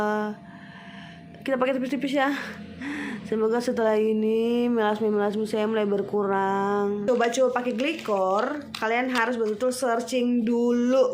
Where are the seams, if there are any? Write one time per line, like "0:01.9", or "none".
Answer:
0:07.0